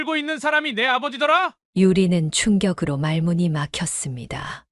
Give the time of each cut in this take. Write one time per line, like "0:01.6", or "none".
none